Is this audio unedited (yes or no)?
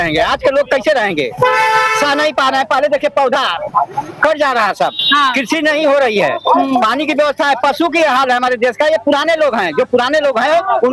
yes